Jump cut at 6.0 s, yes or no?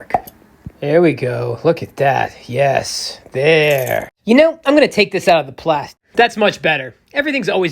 yes